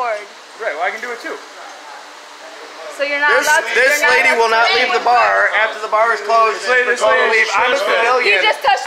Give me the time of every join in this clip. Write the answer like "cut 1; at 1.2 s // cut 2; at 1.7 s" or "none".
cut 1; at 2.2 s // cut 2; at 6.6 s